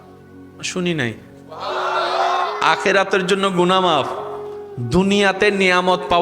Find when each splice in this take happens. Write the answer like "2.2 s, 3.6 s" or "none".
none